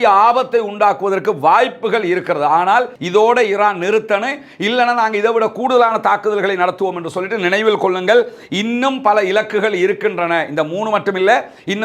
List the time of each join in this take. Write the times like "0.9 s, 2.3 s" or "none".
3.0 s